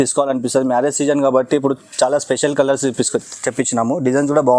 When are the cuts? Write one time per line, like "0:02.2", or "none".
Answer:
none